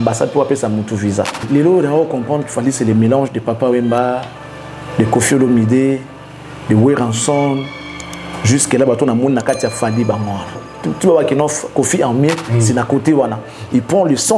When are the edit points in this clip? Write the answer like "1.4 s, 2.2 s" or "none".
1.4 s, 10.7 s